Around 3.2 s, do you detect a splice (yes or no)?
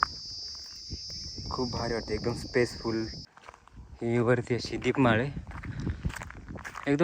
yes